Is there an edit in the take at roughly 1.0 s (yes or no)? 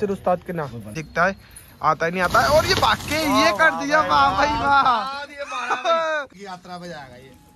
yes